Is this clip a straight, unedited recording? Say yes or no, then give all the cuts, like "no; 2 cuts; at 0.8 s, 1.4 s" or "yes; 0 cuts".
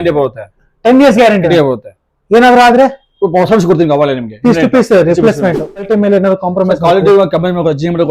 no; 1 cut; at 5.8 s